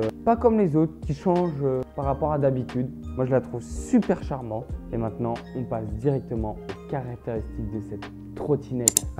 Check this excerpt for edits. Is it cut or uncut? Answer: uncut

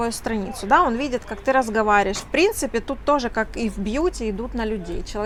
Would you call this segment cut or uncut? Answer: uncut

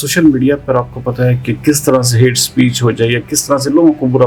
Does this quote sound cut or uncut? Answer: uncut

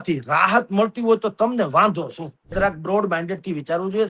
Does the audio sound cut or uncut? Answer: cut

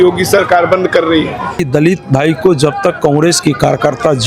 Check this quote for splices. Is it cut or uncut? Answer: cut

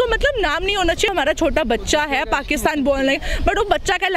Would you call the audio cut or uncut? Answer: cut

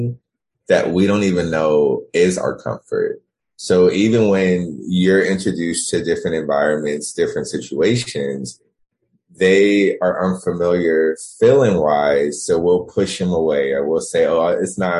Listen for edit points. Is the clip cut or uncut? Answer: uncut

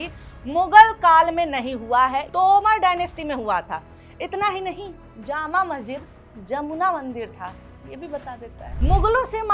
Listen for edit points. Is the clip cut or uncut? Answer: cut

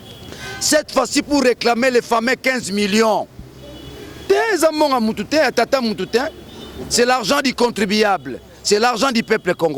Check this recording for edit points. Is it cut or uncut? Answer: uncut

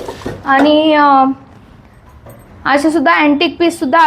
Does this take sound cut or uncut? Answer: uncut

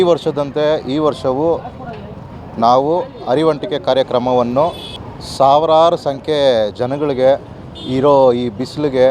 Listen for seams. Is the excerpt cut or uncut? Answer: uncut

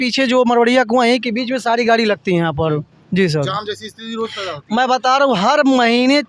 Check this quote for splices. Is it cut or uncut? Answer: uncut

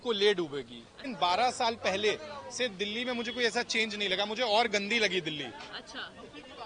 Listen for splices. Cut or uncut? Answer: cut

